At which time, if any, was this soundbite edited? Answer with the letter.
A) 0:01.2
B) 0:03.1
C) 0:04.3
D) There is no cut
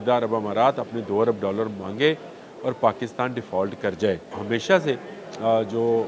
C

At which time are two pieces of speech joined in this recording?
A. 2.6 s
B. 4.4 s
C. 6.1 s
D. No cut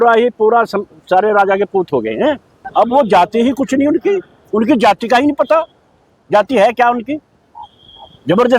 A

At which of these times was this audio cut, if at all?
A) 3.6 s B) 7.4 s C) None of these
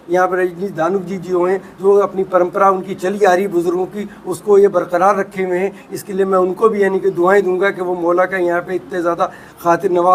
C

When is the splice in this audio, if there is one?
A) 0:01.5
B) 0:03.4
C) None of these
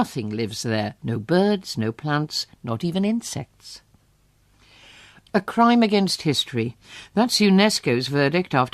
B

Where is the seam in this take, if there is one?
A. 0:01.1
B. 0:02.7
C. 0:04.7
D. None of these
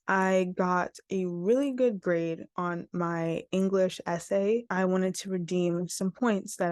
C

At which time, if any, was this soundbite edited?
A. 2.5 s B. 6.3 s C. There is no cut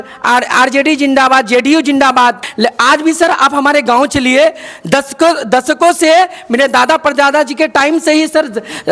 A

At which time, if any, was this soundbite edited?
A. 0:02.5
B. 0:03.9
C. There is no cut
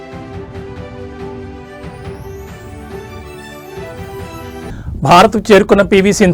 B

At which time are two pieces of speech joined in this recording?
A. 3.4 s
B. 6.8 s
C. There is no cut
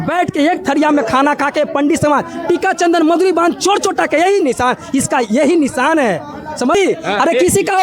B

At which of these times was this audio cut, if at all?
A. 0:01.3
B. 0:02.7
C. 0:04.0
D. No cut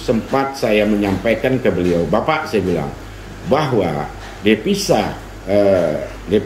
D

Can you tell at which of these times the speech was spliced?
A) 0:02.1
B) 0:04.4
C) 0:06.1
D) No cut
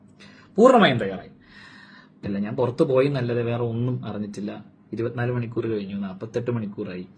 A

